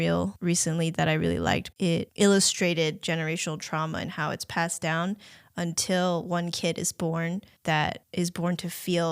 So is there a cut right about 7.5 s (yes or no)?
yes